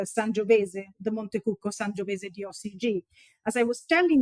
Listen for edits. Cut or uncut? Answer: uncut